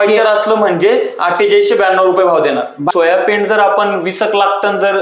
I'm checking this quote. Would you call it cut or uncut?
cut